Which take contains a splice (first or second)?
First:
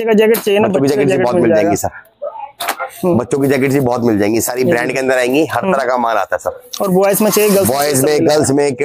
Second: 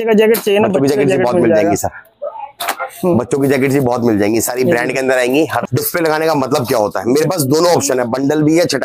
second